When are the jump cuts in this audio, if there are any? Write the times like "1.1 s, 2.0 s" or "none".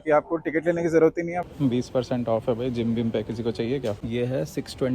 1.4 s, 4.0 s